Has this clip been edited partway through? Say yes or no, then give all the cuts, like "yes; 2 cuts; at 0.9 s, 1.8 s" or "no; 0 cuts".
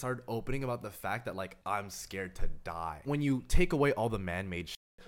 yes; 2 cuts; at 1.6 s, 3.0 s